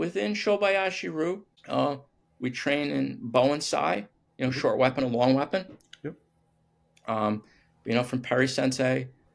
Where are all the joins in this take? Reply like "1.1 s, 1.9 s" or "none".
1.5 s